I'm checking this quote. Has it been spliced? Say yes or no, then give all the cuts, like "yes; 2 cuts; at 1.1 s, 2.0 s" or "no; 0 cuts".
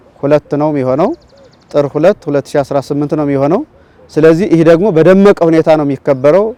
no; 0 cuts